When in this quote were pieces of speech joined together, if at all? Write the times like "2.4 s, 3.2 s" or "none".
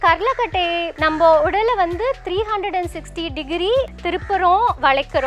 0.9 s, 4.0 s

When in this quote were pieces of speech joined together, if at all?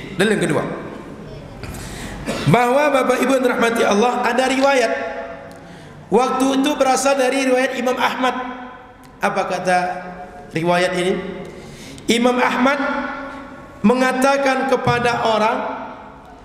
none

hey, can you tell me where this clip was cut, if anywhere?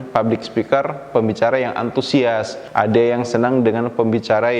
2.6 s

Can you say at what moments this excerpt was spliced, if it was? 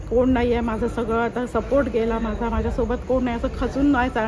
none

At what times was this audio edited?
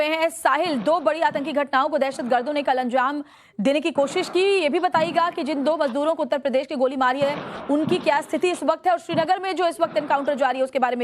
3.7 s

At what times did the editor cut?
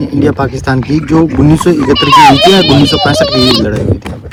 none

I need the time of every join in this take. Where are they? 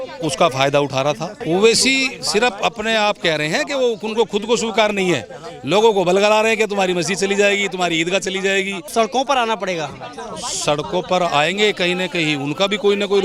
1.3 s, 8.8 s

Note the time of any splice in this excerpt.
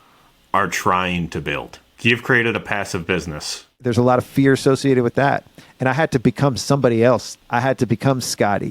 3.8 s, 7.3 s

